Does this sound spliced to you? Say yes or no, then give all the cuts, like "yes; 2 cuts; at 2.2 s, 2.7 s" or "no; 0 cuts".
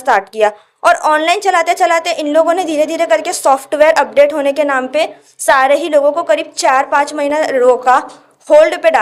no; 0 cuts